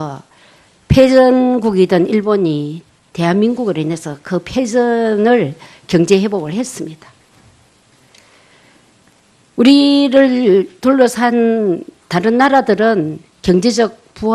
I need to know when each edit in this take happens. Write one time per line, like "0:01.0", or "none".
0:03.1